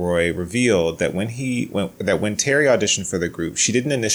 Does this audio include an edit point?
no; 0 cuts

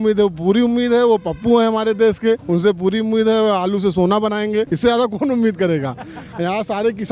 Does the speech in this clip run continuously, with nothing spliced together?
no; 2 cuts; at 2.4 s, 4.7 s

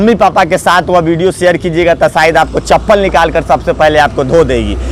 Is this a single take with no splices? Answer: yes; 0 cuts

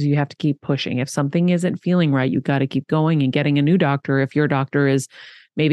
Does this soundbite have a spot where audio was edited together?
no; 0 cuts

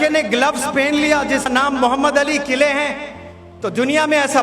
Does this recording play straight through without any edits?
no; 1 cut; at 1.5 s

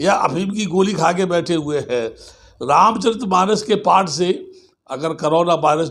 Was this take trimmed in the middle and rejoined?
no; 0 cuts

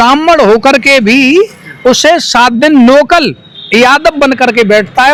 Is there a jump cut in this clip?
no; 0 cuts

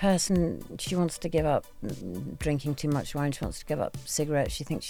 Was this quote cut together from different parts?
no; 0 cuts

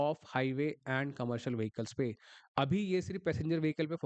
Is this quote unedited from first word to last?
yes; 0 cuts

